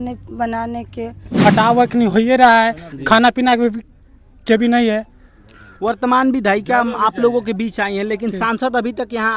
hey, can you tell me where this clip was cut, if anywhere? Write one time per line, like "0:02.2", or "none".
0:01.5